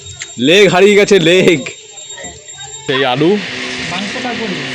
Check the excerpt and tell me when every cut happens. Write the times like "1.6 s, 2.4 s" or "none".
2.9 s